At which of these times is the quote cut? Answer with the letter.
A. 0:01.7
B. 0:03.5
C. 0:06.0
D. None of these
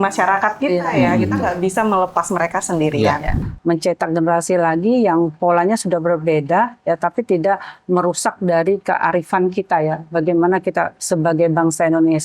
B